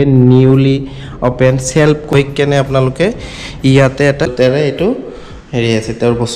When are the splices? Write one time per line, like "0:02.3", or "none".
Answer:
0:02.1
0:04.3